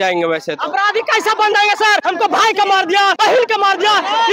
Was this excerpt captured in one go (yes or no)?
no